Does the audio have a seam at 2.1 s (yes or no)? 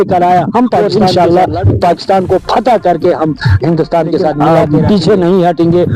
no